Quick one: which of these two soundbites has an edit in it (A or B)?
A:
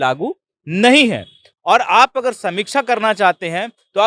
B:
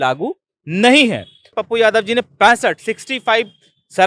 B